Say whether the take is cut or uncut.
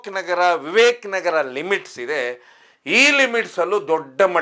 uncut